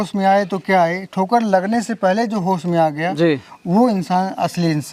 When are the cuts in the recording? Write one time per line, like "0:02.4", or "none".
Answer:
none